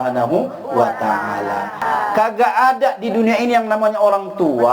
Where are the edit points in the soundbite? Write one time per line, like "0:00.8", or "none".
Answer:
0:01.8